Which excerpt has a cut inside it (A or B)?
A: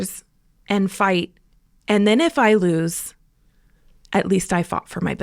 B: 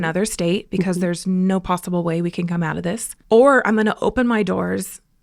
B